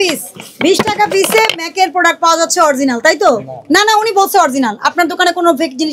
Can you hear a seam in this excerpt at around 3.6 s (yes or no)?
no